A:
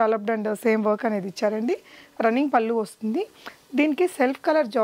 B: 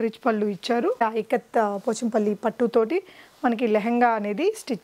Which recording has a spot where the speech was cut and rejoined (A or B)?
B